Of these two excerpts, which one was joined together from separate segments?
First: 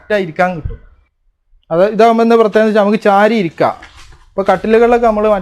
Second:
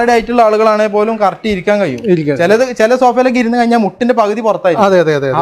first; 1 cut; at 1.2 s

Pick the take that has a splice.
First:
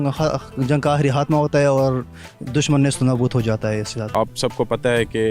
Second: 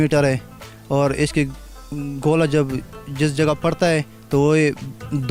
first; 1 cut; at 4.0 s

